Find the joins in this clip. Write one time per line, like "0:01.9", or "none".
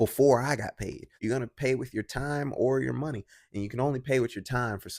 0:01.1